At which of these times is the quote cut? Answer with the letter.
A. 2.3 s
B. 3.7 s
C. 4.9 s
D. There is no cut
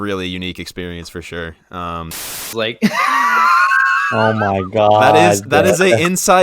A